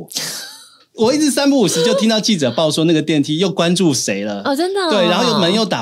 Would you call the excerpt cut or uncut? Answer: uncut